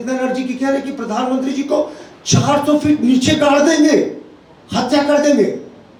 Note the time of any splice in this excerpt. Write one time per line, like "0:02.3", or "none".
none